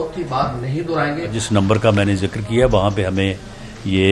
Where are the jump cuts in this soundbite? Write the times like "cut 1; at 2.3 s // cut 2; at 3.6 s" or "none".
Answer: cut 1; at 1.4 s